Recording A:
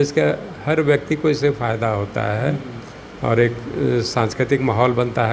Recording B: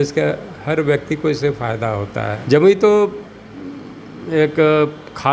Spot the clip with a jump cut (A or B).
B